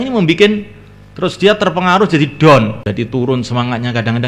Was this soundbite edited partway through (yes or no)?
yes